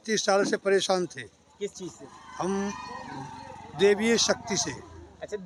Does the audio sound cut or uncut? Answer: uncut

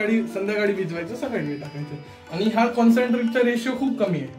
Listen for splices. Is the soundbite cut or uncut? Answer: uncut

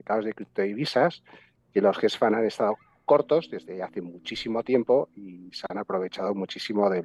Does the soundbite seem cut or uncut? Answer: uncut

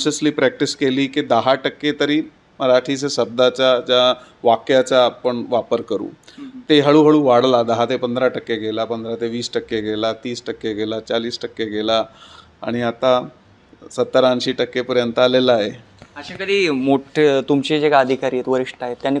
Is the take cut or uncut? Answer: uncut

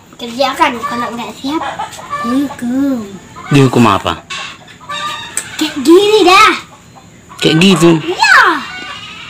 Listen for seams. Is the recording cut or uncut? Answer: cut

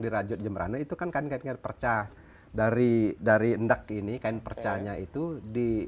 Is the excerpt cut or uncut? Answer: uncut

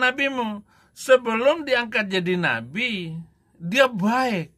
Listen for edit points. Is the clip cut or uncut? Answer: uncut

